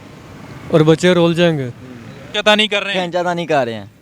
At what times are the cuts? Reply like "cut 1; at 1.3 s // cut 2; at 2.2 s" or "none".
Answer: cut 1; at 2.3 s